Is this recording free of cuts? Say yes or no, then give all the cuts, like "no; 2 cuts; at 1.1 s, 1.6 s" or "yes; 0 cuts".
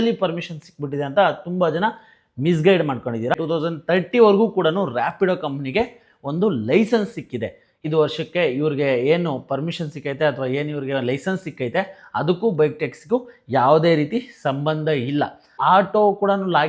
no; 3 cuts; at 3.4 s, 7.8 s, 15.6 s